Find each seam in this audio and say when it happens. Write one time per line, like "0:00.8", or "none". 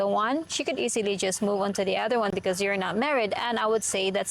none